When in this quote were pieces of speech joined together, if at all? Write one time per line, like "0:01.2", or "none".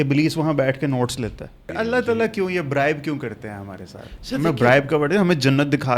0:01.7